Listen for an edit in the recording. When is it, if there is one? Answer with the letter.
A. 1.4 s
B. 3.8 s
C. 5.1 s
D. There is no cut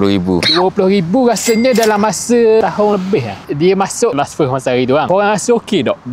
C